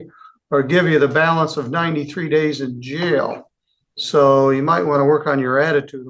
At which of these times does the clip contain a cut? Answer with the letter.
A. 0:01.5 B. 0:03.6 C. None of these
C